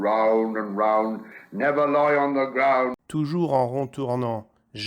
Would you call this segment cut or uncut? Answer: cut